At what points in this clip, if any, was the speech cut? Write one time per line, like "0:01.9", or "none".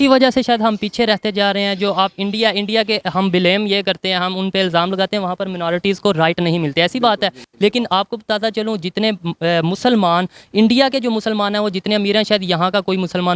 none